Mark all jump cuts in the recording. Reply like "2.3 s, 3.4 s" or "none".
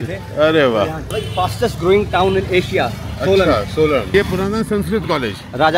1.1 s, 4.1 s

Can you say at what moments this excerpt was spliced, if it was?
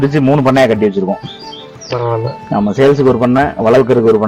none

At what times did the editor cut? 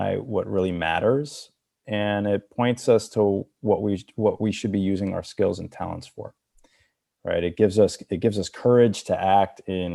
none

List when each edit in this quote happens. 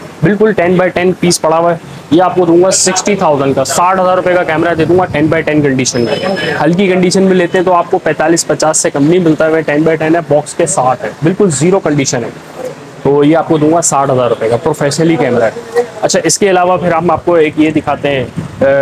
none

